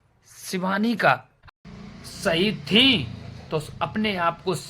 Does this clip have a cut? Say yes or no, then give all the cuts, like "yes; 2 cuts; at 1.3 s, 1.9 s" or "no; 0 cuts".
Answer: yes; 1 cut; at 1.4 s